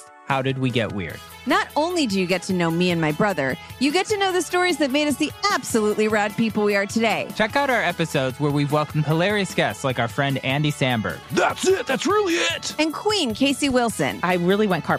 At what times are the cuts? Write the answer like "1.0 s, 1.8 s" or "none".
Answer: 7.3 s